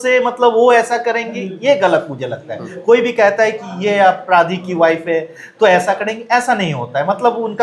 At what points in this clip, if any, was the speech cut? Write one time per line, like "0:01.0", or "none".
none